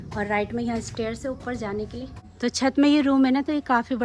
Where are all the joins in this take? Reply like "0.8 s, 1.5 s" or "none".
2.2 s